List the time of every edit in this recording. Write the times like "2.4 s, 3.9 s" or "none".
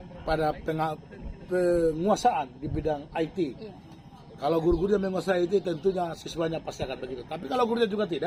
none